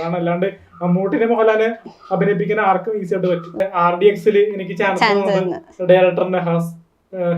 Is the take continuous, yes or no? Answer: no